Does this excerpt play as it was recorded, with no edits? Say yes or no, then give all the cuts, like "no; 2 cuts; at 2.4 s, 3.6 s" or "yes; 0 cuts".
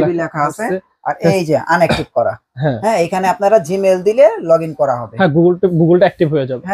yes; 0 cuts